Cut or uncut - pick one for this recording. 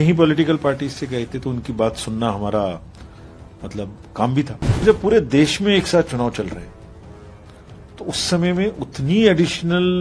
cut